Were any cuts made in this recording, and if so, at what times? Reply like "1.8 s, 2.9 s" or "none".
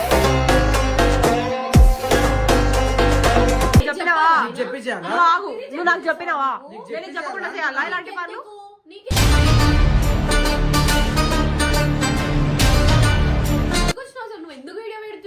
none